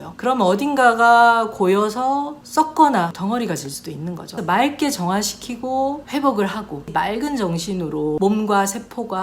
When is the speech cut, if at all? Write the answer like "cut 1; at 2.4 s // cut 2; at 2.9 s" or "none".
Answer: cut 1; at 3.2 s // cut 2; at 4.3 s // cut 3; at 6.9 s // cut 4; at 8.2 s